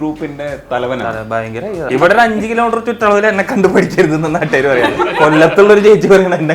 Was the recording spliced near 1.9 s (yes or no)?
yes